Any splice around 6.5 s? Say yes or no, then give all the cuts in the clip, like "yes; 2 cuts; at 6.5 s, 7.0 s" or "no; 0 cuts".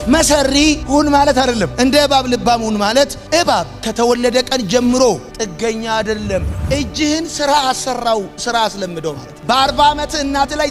yes; 1 cut; at 6.5 s